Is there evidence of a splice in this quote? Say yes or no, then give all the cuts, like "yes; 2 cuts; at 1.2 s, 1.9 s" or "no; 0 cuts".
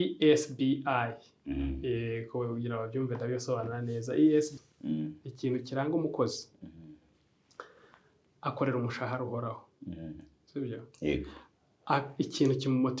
yes; 1 cut; at 4.5 s